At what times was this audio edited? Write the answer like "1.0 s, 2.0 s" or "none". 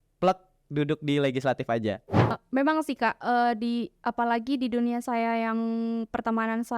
2.3 s